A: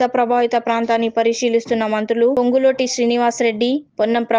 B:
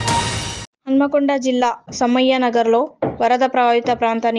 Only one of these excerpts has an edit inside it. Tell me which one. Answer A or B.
A